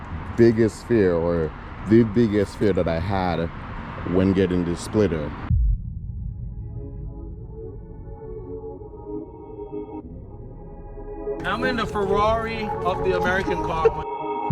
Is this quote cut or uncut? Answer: cut